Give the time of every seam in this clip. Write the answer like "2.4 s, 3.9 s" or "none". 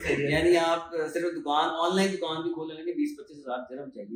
none